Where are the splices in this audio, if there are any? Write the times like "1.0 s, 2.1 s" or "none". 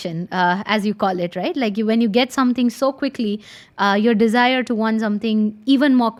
none